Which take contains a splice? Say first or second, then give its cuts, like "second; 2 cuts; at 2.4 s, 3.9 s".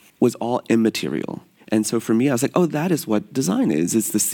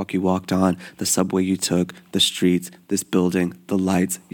first; 1 cut; at 1.5 s